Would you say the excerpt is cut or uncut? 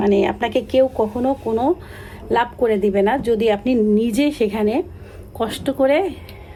uncut